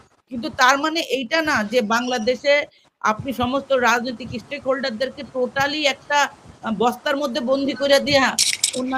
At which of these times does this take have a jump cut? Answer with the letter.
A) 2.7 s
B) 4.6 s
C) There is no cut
C